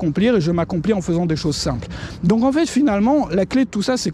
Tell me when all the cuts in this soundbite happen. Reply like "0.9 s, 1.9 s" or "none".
none